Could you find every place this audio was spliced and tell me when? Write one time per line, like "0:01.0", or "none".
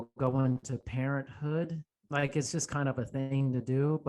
0:01.9